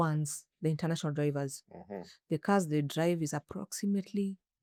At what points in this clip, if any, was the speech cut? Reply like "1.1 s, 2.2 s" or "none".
none